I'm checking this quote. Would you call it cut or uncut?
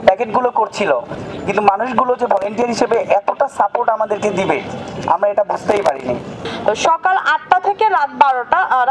cut